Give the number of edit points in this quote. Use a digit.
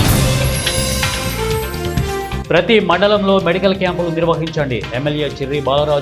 1